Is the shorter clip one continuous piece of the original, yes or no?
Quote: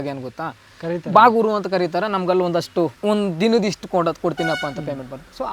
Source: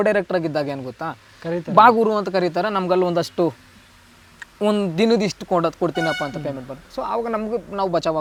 no